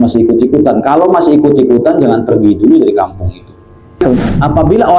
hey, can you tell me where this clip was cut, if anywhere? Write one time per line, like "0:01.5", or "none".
0:04.0